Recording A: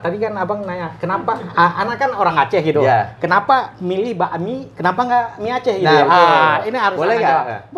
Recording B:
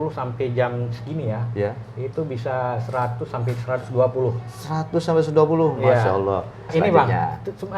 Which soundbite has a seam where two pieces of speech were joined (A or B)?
B